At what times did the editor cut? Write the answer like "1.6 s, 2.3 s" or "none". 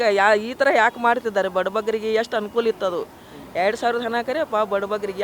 none

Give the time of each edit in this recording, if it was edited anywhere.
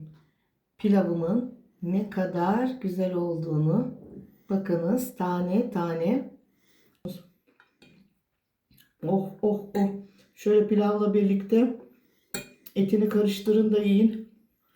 7.0 s

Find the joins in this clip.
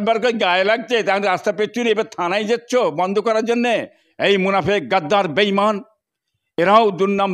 4.0 s

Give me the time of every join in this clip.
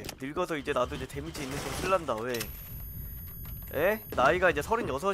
4.1 s

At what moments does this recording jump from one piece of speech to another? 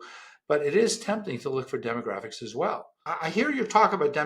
3.1 s

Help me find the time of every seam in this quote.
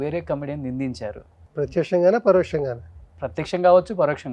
1.4 s

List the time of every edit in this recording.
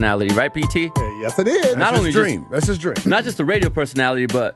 2.8 s

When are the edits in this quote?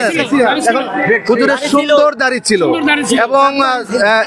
none

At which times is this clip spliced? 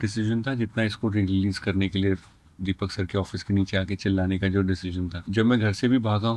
5.2 s

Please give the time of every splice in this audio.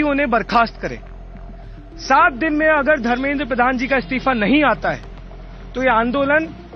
none

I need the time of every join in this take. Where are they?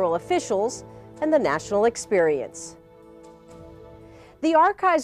2.9 s

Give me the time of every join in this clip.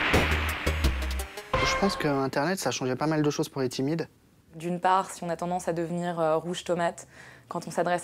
1.6 s

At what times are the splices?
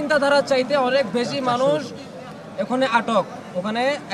none

